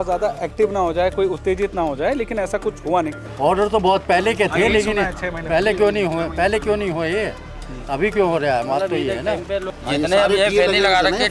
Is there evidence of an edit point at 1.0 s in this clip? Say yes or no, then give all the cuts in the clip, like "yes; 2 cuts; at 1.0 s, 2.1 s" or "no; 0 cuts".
no; 2 cuts; at 3.2 s, 9.7 s